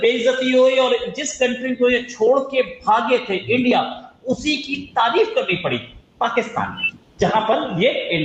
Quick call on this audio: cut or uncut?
uncut